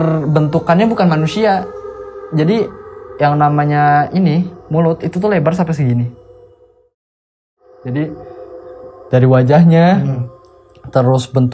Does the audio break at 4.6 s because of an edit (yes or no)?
no